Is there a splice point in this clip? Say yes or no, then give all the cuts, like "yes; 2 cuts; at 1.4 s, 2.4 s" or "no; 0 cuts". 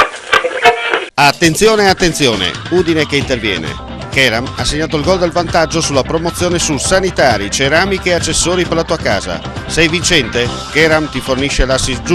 no; 0 cuts